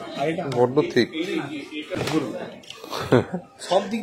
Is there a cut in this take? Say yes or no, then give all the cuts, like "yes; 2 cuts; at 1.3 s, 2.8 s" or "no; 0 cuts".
yes; 1 cut; at 2.0 s